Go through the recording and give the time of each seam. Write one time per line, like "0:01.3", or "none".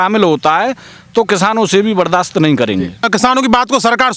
0:03.0